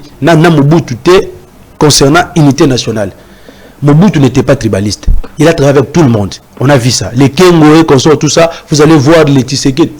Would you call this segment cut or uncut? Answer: uncut